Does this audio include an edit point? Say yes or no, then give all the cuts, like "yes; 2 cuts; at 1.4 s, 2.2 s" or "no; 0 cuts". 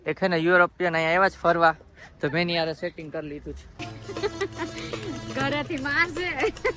no; 0 cuts